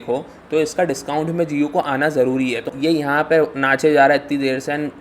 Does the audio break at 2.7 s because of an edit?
yes; 1 cut; at 2.7 s

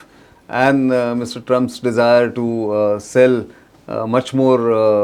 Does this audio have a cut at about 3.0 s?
no; 0 cuts

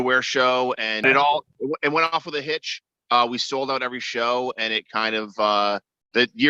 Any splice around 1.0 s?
yes; 1 cut; at 1.0 s

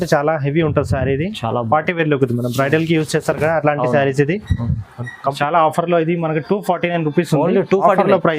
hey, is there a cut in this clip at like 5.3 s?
yes; 1 cut; at 5.3 s

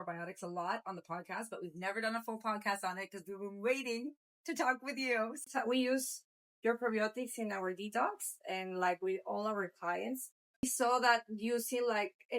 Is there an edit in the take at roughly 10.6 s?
yes; 2 cuts; at 5.5 s, 10.6 s

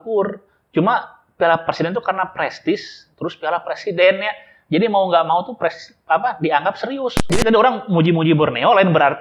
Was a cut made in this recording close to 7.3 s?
yes; 1 cut; at 7.3 s

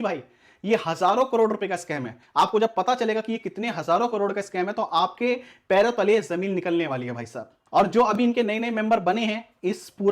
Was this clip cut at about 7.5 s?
yes; 2 cuts; at 2.2 s, 7.5 s

